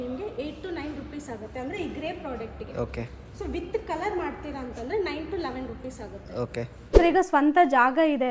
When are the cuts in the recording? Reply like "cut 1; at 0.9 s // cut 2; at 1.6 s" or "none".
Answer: cut 1; at 6.9 s